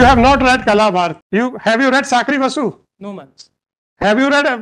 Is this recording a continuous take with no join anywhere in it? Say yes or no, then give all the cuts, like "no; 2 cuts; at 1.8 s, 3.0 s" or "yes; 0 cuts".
no; 1 cut; at 1.2 s